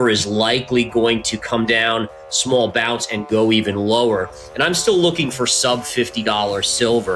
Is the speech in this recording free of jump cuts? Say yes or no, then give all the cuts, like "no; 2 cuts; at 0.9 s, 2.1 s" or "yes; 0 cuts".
yes; 0 cuts